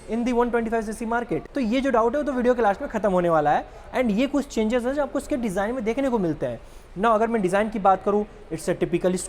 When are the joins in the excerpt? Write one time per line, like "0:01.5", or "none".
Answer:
none